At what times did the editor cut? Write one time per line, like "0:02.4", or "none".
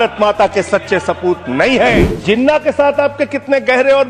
0:02.1